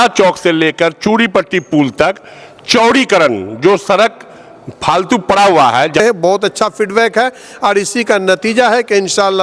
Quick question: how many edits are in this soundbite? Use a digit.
1